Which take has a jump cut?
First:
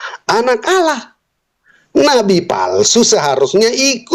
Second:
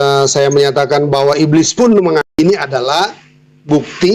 second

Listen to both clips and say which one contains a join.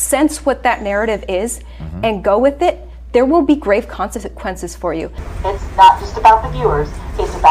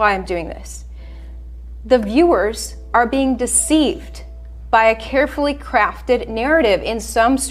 first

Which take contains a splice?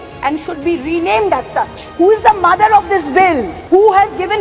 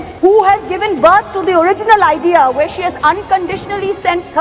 first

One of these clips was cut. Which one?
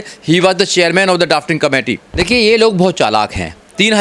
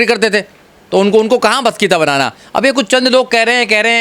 first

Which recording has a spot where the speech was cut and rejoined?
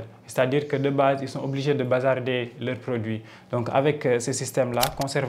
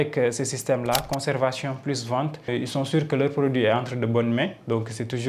second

